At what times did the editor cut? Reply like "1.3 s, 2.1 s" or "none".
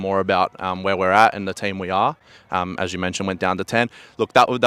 none

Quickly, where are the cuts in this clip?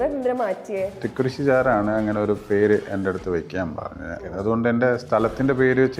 1.0 s, 4.2 s

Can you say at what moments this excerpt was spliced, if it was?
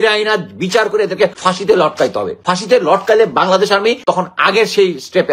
1.4 s, 2.3 s, 4.0 s

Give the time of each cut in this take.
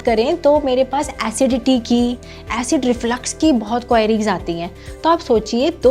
none

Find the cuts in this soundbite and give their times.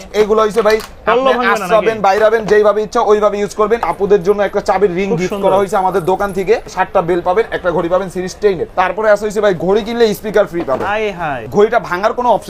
3.9 s, 6.7 s, 8.7 s, 11.4 s

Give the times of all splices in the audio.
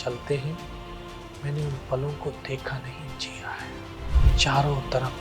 4.1 s

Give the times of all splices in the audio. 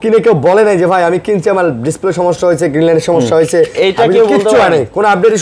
none

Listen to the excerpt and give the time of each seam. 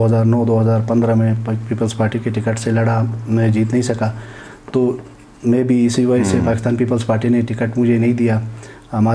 none

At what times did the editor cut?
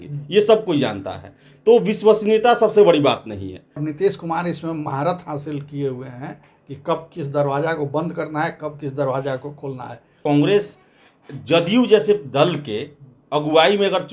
3.8 s, 10.2 s

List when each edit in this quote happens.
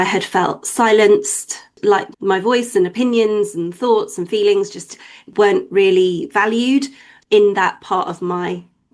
1.8 s, 5.3 s

